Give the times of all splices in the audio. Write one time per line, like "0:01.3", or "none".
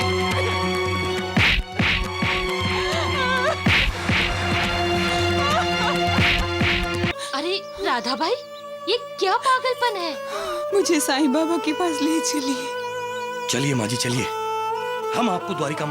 0:07.1